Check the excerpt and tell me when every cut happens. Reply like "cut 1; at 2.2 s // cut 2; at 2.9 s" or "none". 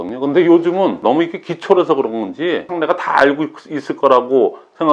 cut 1; at 1.0 s // cut 2; at 2.7 s